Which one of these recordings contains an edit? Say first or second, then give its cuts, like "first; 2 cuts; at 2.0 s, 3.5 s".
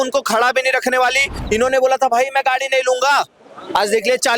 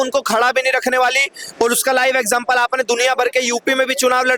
first; 1 cut; at 1.3 s